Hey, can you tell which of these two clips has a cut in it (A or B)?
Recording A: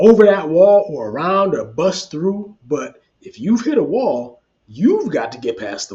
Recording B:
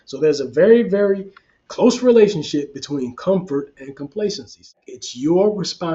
B